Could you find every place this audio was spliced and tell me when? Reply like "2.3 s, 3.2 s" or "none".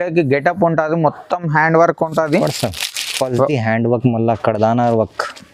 none